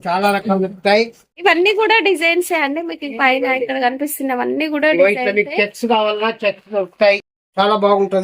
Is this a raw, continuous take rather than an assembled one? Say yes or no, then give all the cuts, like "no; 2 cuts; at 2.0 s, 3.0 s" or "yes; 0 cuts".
no; 2 cuts; at 1.2 s, 7.3 s